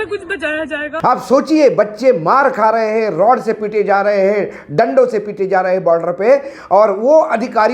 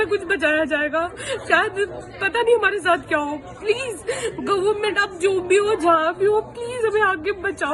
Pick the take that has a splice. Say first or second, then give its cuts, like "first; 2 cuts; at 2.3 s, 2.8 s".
first; 1 cut; at 1.0 s